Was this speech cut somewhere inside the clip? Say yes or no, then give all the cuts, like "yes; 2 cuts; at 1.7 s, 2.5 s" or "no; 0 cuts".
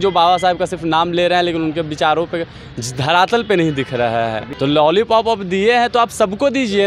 yes; 1 cut; at 4.4 s